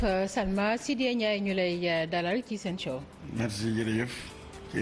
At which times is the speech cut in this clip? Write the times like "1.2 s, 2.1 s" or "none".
2.1 s